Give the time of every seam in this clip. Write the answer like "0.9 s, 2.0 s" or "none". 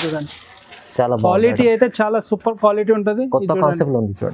none